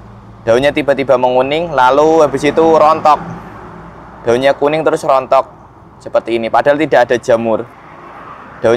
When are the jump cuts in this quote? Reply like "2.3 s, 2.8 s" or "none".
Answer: none